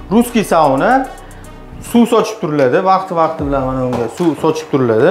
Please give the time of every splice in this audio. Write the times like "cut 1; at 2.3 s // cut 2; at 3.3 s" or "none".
none

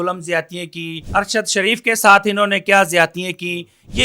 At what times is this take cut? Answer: cut 1; at 1.0 s

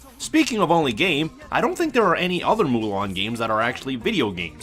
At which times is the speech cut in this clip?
none

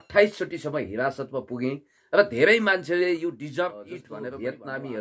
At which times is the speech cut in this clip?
cut 1; at 4.0 s

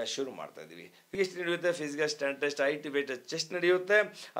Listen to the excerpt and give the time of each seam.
cut 1; at 1.0 s

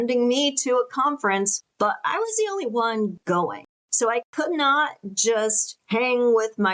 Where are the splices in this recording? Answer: cut 1; at 1.6 s // cut 2; at 3.3 s

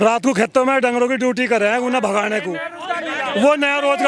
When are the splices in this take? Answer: none

